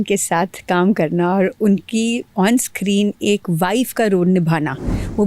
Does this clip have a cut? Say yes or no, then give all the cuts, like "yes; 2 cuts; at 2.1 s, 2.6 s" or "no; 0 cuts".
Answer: no; 0 cuts